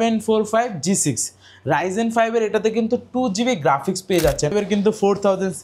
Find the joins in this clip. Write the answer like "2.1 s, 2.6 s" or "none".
4.5 s